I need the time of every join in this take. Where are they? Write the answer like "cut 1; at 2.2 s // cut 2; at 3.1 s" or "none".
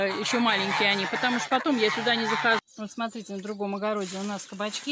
cut 1; at 2.6 s